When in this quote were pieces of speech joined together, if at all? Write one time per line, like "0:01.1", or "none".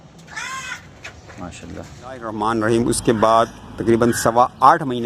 0:02.3